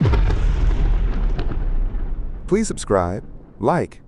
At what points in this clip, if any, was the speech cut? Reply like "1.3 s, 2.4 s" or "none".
none